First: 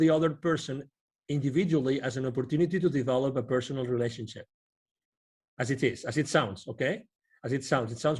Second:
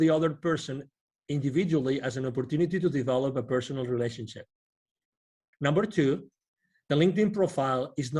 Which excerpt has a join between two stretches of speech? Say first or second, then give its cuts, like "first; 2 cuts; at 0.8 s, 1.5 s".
second; 1 cut; at 5.4 s